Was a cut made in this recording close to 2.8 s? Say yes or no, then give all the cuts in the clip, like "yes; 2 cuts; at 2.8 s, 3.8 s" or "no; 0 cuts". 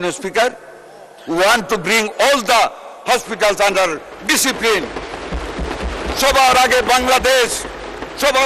no; 0 cuts